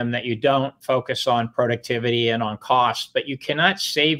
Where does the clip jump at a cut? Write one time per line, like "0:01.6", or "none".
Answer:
none